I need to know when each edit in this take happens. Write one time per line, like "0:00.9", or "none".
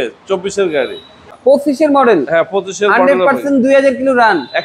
0:01.3

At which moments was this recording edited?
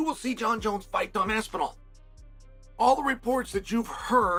none

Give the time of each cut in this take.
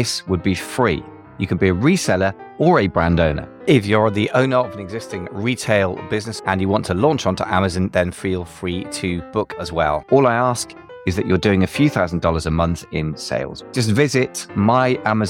0:03.5
0:06.3
0:09.6
0:13.6

